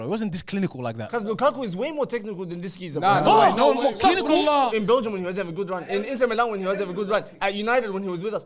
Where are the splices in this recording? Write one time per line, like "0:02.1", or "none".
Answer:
0:01.1
0:04.7